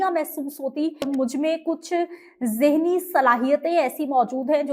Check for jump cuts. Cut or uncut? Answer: cut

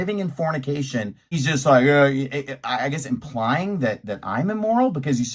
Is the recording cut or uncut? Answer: cut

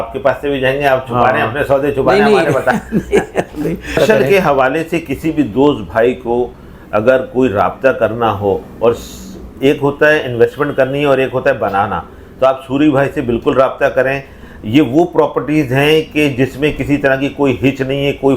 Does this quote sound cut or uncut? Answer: uncut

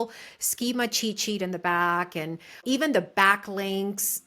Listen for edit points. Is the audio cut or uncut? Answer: cut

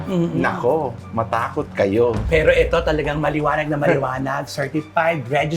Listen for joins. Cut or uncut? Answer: uncut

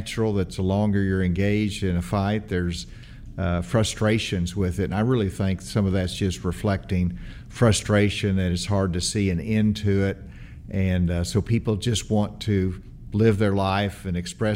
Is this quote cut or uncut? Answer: uncut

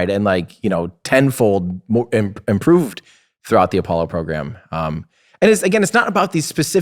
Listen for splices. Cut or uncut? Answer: uncut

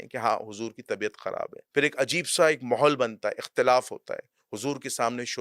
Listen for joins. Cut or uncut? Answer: cut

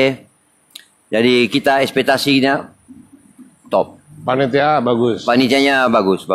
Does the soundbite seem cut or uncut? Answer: uncut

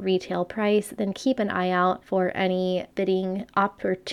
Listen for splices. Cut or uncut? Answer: cut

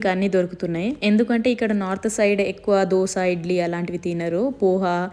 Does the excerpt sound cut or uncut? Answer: cut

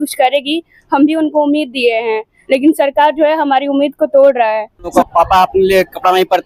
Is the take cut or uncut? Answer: cut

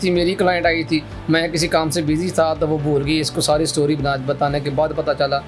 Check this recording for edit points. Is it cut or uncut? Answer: uncut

